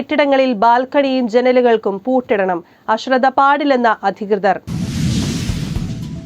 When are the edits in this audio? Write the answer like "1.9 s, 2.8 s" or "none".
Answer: 4.6 s